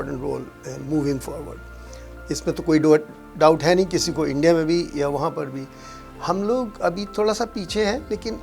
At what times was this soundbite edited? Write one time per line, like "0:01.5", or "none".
none